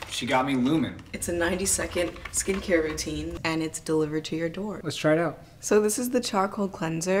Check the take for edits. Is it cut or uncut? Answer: cut